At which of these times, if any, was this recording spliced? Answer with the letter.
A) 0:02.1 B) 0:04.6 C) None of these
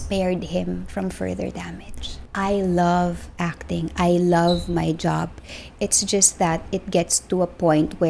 A